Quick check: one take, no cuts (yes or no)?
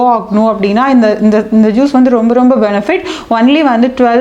yes